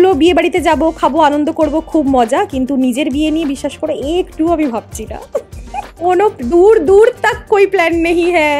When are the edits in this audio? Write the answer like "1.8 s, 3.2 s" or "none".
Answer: none